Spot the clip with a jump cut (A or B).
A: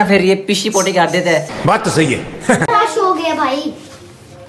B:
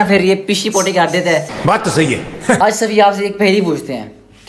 B